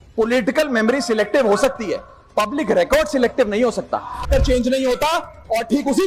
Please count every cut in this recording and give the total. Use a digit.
1